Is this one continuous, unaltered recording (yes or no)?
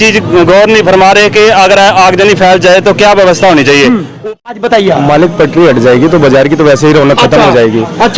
no